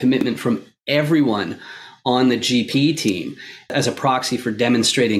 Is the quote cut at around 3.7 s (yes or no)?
yes